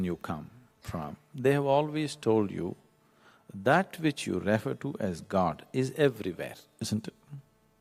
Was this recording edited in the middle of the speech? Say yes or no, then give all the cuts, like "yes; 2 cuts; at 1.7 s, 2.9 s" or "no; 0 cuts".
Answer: no; 0 cuts